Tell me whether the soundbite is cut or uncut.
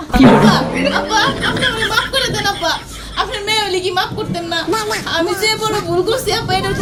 uncut